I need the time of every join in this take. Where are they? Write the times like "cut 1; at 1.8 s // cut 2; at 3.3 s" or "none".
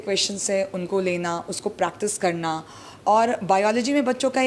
none